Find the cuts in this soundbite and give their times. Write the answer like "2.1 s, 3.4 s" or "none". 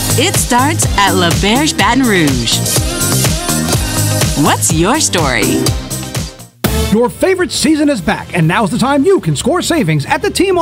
6.4 s